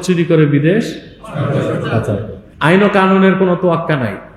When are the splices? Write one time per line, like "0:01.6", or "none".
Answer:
0:02.4